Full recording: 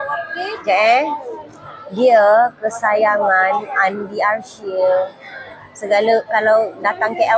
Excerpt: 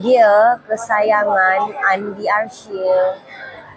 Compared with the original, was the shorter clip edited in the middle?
no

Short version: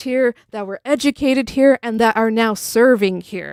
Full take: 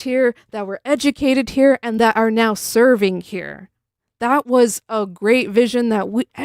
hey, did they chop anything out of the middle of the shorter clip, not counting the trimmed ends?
no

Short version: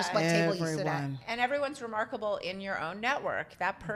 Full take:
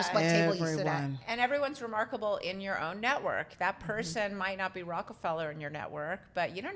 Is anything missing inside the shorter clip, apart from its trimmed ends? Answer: no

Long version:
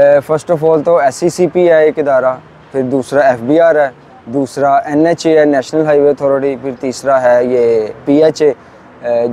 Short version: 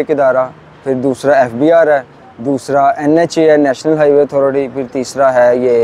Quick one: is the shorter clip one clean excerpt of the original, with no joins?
yes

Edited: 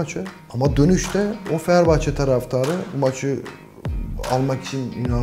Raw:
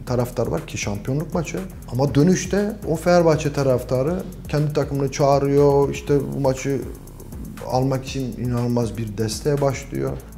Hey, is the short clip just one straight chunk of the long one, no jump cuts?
no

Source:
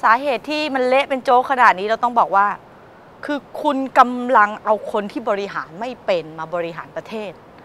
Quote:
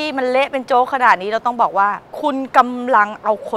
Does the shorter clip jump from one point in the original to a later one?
yes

